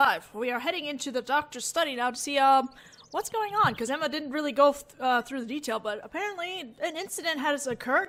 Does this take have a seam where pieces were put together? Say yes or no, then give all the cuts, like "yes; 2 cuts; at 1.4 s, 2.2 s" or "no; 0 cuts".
no; 0 cuts